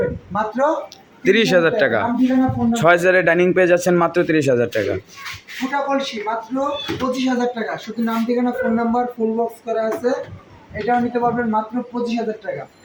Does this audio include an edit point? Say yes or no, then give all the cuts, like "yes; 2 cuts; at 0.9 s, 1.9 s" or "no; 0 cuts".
no; 0 cuts